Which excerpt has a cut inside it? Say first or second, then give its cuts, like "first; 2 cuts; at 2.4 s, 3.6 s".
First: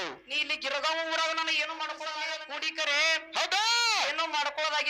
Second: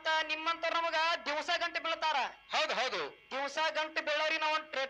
first; 1 cut; at 2.4 s